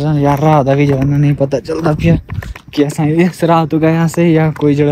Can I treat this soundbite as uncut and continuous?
yes; 0 cuts

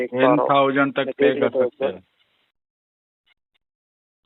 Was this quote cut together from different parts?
no; 0 cuts

